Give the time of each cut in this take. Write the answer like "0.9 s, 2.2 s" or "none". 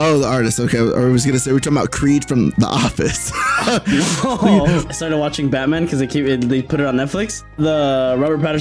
4.9 s, 7.5 s